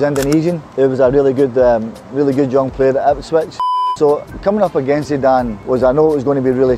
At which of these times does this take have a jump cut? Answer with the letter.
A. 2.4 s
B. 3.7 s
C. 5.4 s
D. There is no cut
B